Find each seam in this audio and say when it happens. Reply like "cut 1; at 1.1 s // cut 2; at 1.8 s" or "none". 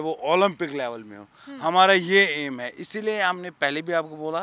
none